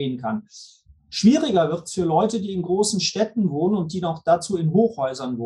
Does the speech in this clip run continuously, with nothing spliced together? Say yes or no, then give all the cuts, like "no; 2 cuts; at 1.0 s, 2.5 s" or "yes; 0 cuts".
yes; 0 cuts